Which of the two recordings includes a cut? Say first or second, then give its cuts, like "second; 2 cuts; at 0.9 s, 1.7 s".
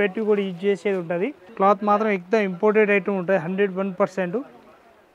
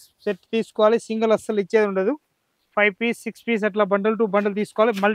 first; 1 cut; at 1.4 s